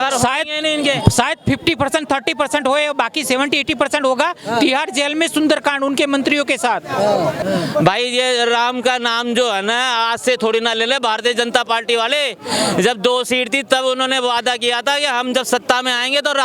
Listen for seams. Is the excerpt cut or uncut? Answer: cut